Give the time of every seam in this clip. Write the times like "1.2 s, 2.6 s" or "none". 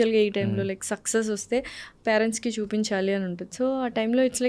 none